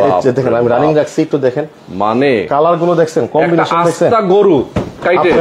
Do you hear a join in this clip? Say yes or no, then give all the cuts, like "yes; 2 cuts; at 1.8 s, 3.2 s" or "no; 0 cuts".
no; 0 cuts